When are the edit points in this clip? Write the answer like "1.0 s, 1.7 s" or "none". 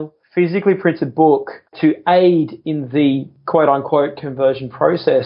1.7 s